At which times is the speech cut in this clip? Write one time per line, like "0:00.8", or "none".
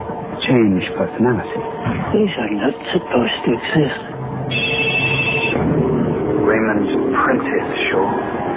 0:02.8